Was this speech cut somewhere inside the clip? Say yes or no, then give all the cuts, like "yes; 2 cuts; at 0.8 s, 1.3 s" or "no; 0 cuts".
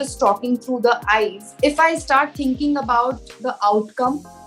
yes; 1 cut; at 1.4 s